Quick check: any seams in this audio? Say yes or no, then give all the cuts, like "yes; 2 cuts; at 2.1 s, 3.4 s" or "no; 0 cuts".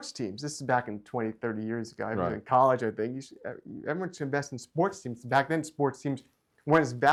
no; 0 cuts